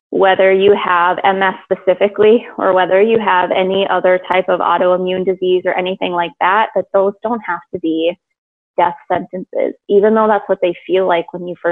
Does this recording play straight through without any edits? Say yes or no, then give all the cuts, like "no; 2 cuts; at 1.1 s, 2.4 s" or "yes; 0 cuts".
yes; 0 cuts